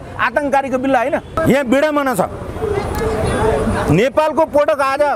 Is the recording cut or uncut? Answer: cut